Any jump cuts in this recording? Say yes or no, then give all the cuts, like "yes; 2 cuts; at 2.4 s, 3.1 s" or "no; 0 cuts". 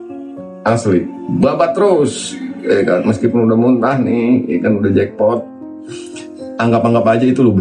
no; 0 cuts